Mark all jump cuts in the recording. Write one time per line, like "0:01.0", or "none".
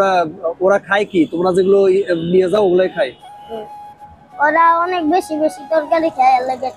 none